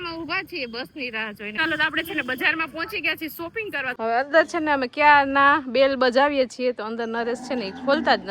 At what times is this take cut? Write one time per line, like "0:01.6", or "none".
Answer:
0:01.6
0:03.9